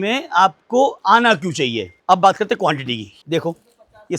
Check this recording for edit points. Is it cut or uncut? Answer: cut